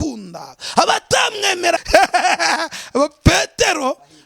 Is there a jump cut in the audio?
yes; 1 cut; at 1.8 s

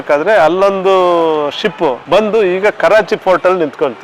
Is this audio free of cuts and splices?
yes; 0 cuts

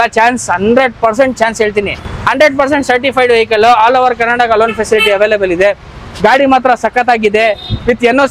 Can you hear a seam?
no; 0 cuts

